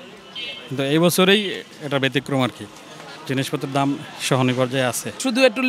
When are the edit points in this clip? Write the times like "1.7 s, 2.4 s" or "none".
none